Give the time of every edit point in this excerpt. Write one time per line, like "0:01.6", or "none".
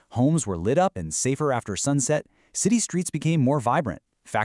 0:02.1